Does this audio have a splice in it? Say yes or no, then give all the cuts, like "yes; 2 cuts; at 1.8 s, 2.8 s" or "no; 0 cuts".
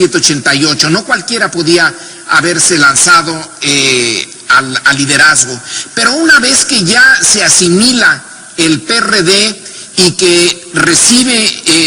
yes; 1 cut; at 3.6 s